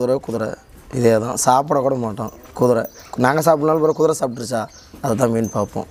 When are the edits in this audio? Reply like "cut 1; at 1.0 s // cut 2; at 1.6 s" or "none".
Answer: none